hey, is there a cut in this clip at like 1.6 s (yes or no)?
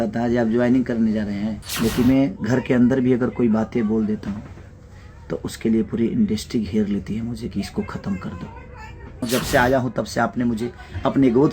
yes